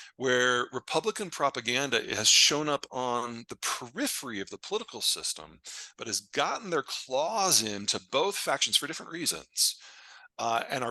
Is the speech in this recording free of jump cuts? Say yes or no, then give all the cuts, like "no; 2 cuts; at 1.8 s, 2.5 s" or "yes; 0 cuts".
yes; 0 cuts